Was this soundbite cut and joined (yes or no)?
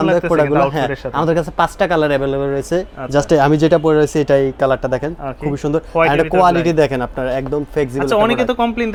no